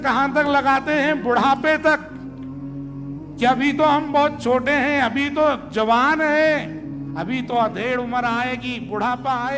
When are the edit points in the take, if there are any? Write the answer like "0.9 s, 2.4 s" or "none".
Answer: 2.1 s, 3.4 s